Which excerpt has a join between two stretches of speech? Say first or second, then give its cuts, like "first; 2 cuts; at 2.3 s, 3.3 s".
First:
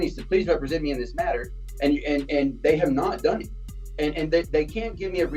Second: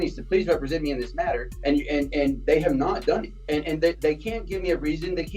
second; 2 cuts; at 1.5 s, 3.3 s